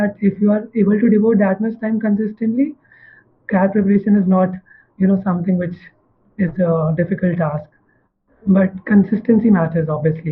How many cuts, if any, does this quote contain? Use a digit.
0